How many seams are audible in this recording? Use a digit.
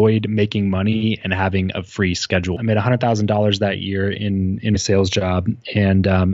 1